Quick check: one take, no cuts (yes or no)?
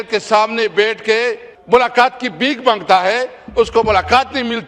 no